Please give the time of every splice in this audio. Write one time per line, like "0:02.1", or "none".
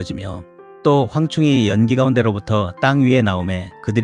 0:00.9